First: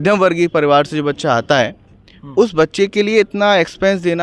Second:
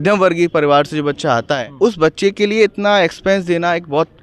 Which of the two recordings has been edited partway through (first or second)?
second